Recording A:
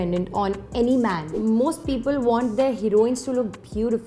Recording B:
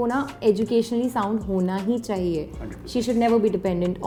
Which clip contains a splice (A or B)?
A